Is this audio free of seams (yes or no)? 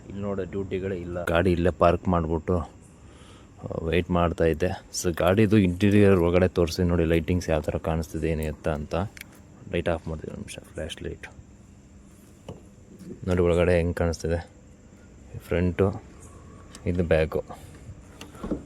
no